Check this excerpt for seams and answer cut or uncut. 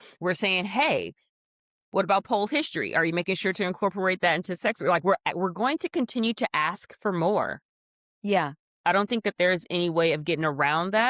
uncut